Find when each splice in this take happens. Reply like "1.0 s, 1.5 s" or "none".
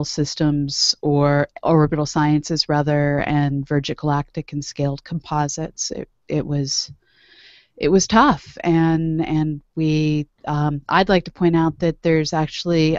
1.5 s

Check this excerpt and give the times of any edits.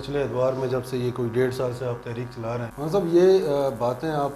2.7 s

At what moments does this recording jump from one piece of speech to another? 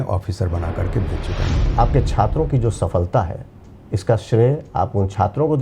1.6 s

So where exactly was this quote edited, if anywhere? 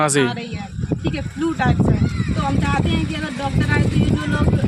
none

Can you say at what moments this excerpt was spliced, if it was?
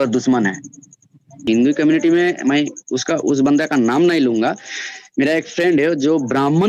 1.4 s

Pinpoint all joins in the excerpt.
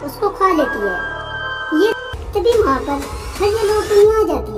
2.1 s

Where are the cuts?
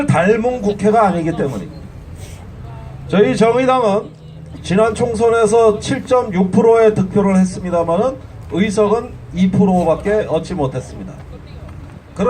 8.1 s

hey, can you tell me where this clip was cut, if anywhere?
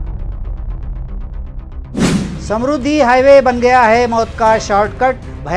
2.4 s

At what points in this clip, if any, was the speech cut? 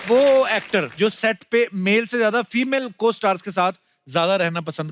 0.9 s

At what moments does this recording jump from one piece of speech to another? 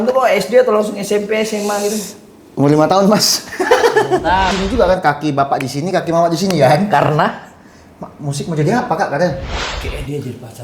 4.5 s, 9.5 s

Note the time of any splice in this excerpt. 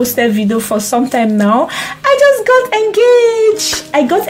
none

